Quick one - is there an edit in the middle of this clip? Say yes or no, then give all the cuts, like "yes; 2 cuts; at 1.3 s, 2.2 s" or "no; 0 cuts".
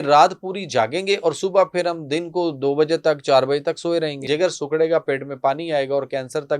yes; 1 cut; at 4.2 s